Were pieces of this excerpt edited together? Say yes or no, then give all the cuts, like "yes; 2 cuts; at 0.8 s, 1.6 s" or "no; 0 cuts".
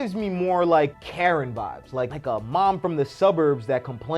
yes; 2 cuts; at 0.9 s, 2.1 s